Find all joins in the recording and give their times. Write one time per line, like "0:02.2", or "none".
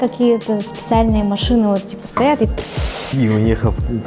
0:03.1